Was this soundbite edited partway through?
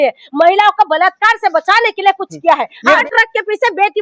yes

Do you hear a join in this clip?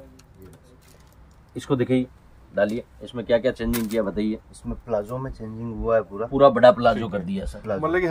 no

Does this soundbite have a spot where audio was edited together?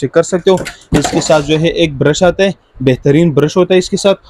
no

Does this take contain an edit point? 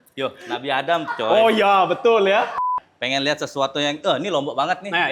yes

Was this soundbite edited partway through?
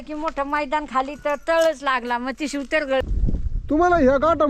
yes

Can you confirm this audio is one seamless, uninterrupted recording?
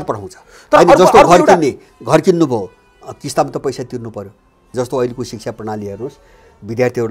no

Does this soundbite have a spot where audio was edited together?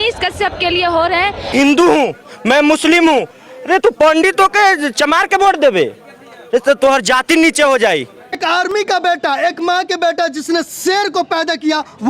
yes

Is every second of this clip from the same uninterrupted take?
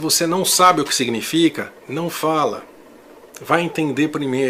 yes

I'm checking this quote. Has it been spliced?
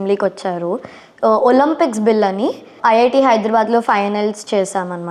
yes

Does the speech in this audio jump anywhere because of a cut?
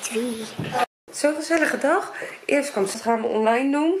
yes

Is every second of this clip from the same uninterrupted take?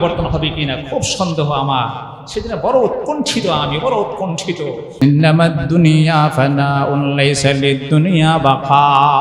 no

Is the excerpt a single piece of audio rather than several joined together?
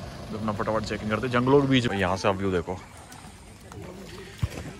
no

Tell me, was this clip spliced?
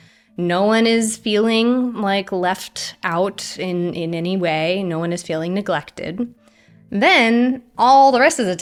no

